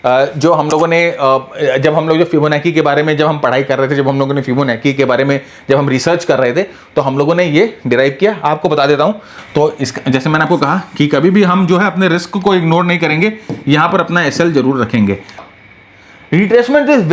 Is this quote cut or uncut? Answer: cut